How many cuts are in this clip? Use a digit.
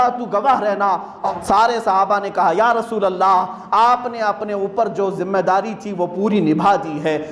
1